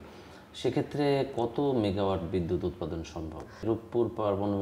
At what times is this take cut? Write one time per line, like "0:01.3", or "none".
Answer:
0:03.6

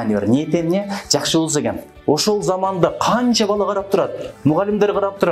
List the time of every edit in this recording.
0:01.9

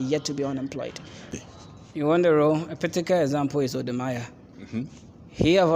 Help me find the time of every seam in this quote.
0:01.3

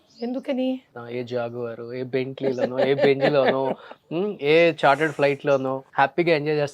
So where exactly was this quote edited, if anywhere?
0:01.0
0:05.8

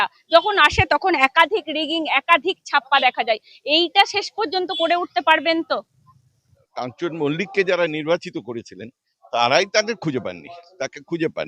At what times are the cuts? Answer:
0:06.6

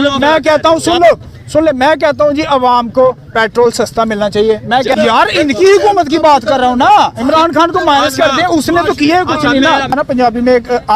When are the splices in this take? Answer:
0:04.9
0:10.0

